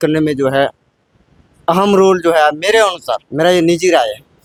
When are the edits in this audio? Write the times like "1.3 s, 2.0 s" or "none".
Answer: none